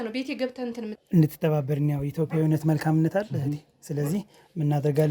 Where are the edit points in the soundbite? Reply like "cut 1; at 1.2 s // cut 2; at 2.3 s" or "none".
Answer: cut 1; at 0.9 s